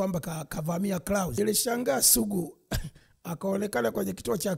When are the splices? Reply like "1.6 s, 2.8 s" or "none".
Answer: 1.4 s